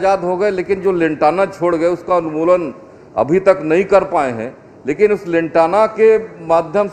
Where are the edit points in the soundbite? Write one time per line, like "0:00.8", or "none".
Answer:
none